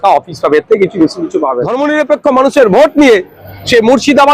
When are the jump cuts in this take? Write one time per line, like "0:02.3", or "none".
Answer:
0:01.6

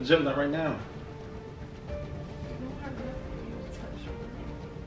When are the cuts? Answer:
0:02.0

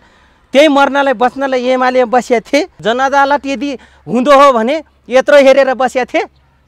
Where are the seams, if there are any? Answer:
0:02.8

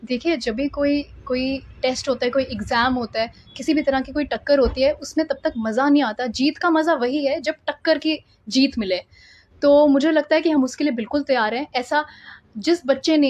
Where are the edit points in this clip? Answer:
none

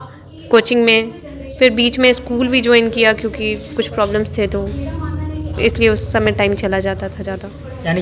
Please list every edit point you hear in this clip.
none

